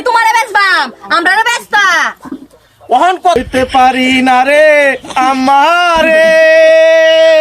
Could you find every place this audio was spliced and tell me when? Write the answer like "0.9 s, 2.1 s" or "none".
3.4 s